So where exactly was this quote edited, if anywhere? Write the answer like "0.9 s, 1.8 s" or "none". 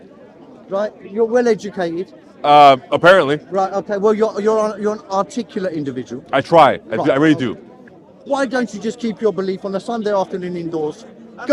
none